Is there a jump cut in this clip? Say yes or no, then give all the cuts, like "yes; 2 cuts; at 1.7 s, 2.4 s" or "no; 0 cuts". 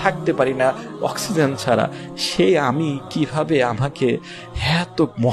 no; 0 cuts